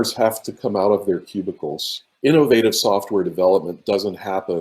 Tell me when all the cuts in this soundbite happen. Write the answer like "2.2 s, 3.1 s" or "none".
2.1 s